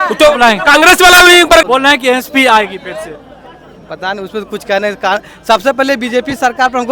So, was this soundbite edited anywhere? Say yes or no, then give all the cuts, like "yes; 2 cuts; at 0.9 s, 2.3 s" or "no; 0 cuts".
no; 0 cuts